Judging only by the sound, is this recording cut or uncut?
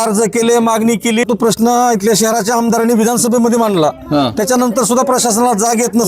cut